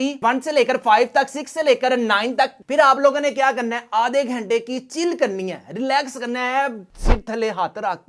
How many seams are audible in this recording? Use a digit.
1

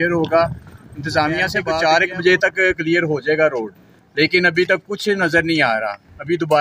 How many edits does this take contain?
1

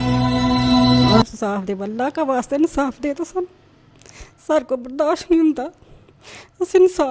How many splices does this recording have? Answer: 1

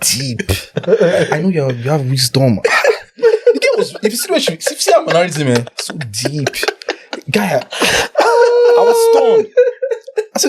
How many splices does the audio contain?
0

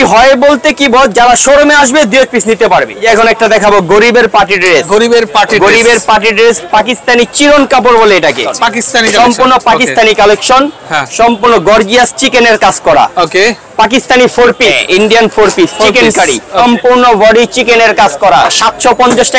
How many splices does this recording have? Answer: 5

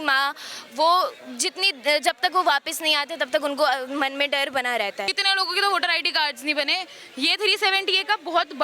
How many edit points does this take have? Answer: 1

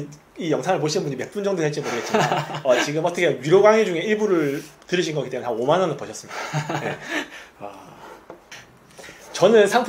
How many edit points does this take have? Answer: 1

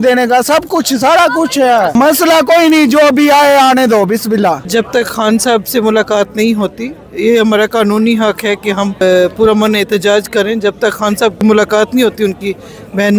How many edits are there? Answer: 4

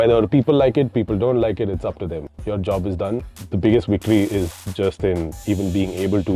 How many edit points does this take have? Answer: 2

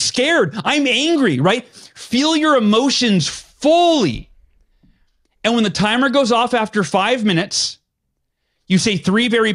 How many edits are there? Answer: 0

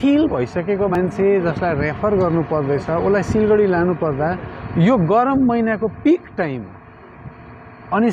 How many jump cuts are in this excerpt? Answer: 1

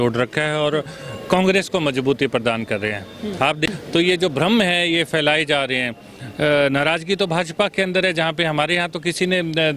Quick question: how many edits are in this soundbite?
1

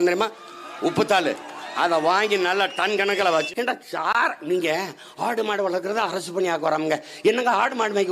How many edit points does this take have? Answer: 1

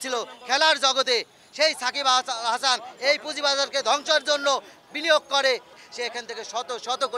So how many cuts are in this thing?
1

